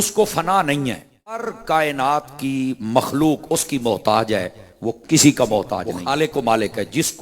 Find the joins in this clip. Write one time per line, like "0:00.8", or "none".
0:01.5
0:05.9